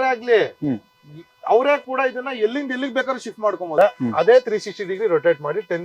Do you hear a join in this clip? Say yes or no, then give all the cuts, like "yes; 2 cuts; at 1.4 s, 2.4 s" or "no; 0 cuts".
yes; 1 cut; at 3.7 s